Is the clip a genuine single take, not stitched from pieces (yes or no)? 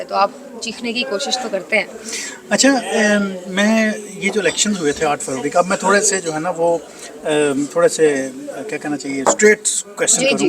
yes